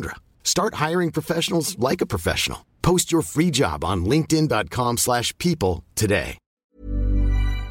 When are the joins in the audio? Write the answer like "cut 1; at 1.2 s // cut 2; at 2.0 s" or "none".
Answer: cut 1; at 6.6 s